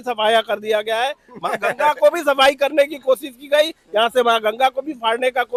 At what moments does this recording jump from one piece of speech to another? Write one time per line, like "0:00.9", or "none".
none